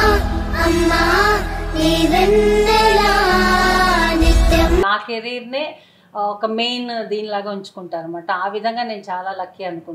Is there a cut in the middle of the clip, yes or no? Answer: yes